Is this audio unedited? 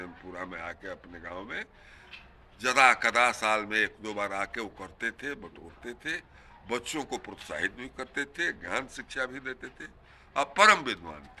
yes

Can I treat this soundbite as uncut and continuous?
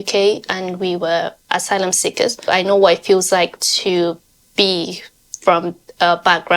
no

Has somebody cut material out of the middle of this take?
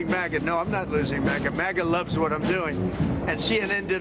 no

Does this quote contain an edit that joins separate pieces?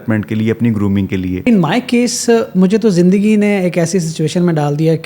yes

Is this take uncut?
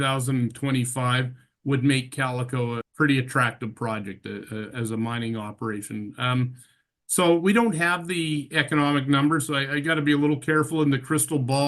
no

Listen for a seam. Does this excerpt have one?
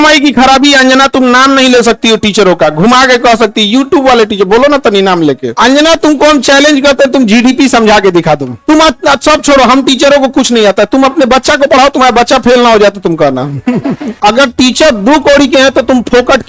yes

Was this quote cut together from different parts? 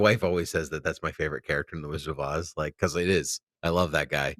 no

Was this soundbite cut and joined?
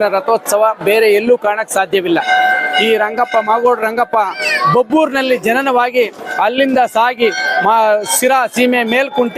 no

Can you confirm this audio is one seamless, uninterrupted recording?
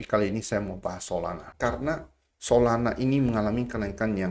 no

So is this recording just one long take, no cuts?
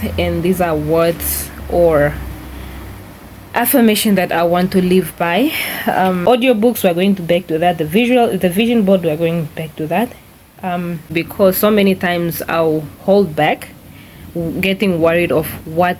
no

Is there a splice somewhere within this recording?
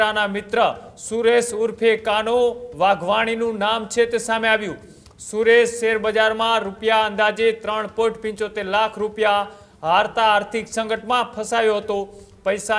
no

